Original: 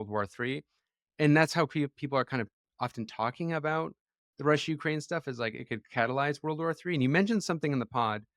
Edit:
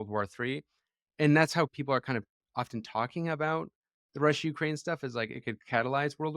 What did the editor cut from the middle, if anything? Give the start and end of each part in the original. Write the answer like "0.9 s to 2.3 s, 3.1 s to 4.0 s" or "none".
1.7 s to 2.0 s